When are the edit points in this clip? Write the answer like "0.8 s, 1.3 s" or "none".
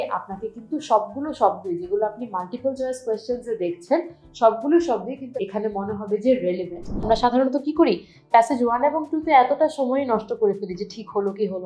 5.2 s, 7.1 s